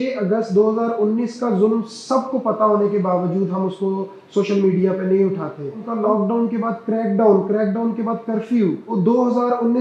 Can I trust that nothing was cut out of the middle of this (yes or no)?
no